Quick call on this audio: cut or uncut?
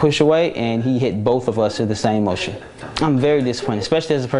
cut